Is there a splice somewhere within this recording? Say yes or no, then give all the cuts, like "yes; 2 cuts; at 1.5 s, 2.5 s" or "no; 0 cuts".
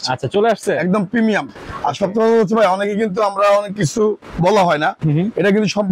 no; 0 cuts